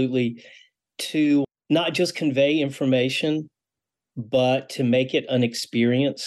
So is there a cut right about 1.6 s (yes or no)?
yes